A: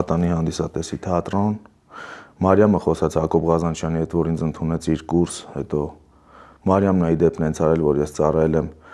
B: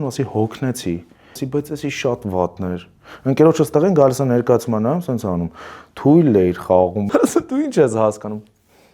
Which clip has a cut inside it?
B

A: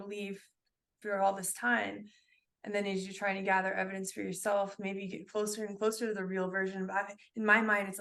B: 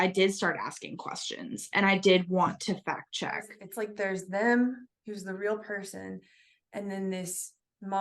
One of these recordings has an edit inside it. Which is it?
B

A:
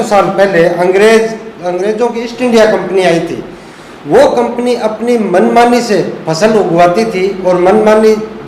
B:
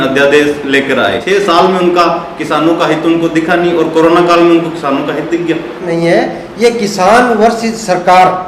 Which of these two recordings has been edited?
B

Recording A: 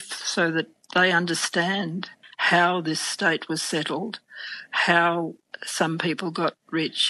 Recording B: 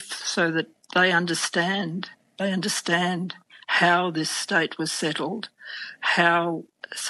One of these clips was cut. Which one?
A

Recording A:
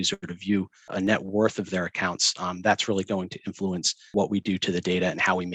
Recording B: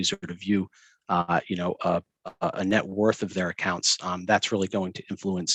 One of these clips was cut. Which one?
A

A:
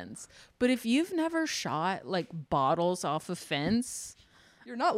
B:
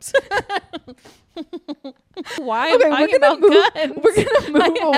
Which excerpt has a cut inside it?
B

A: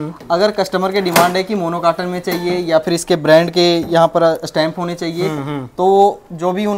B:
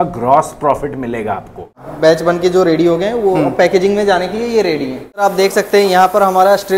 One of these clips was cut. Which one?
B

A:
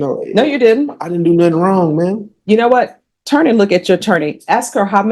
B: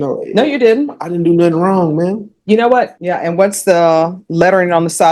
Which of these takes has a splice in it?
B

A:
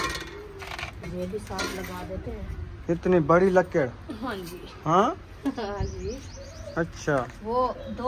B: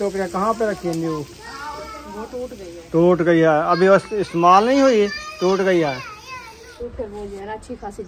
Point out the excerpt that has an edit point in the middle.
B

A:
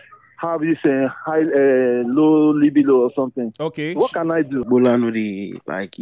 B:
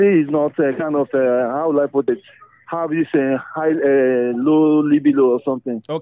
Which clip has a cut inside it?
A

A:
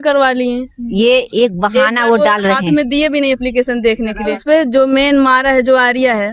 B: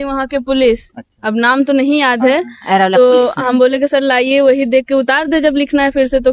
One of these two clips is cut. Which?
A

